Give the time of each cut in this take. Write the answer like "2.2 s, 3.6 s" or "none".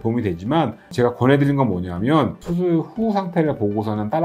2.4 s